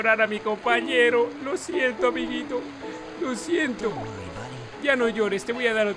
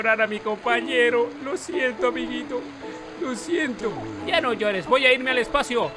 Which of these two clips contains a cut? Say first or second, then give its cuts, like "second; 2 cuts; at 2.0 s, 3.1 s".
second; 1 cut; at 4.1 s